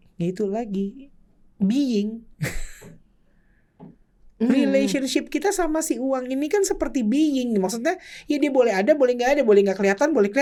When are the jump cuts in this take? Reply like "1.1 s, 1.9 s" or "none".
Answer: none